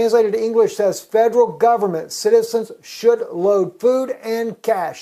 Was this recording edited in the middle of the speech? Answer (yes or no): no